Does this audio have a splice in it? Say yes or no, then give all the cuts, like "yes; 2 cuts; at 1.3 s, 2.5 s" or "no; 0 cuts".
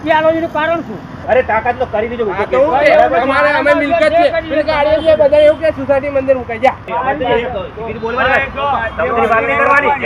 yes; 2 cuts; at 1.2 s, 6.8 s